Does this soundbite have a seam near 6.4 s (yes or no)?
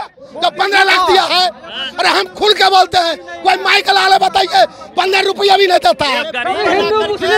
yes